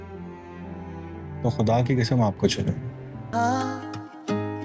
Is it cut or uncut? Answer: cut